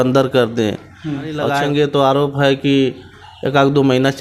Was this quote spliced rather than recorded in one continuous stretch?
yes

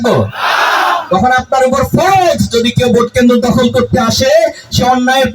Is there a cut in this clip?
no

